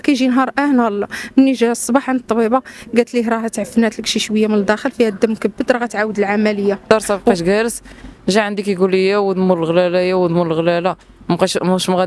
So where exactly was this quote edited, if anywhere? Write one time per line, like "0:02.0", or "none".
0:06.8